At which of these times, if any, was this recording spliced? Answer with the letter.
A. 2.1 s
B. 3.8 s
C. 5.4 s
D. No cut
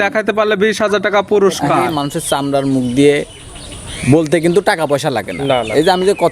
A